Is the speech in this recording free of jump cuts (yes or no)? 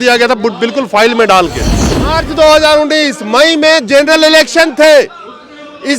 no